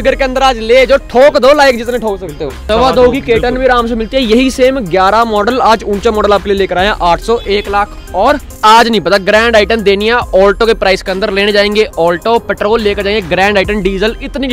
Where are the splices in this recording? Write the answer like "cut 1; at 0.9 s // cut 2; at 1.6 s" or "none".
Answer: cut 1; at 2.6 s // cut 2; at 8.6 s

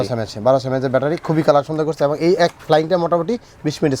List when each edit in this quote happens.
none

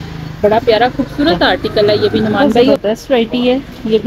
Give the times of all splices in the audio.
cut 1; at 2.8 s

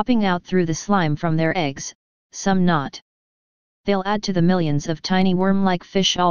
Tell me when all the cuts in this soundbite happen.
cut 1; at 4.5 s

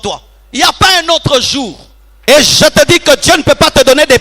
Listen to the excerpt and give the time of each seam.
cut 1; at 2.1 s

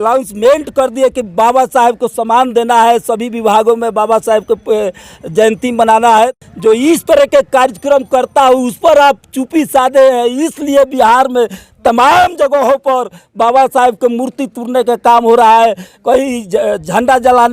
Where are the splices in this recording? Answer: cut 1; at 6.3 s

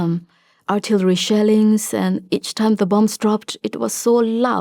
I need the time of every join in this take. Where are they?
none

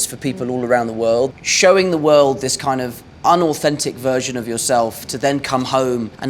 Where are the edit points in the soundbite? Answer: cut 1; at 1.3 s

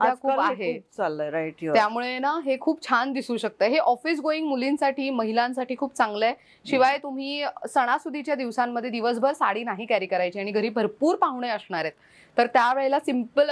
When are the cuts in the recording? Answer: none

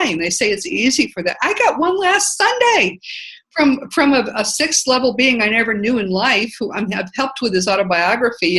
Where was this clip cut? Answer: cut 1; at 7.1 s

